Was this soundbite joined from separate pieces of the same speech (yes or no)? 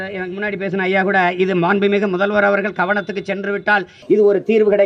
no